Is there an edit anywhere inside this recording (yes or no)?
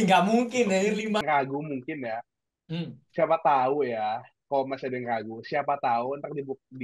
yes